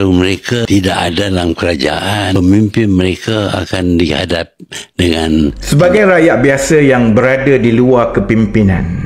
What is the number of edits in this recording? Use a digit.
1